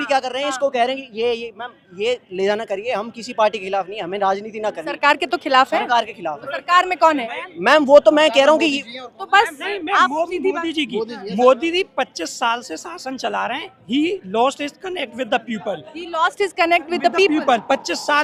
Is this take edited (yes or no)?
no